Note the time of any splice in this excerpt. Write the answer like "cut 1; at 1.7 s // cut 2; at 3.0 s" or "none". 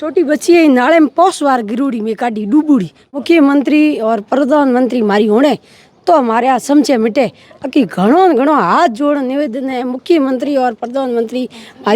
cut 1; at 3.2 s